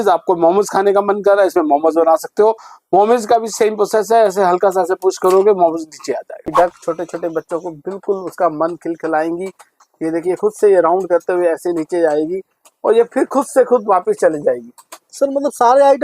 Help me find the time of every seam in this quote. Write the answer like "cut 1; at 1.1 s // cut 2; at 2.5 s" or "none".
cut 1; at 6.3 s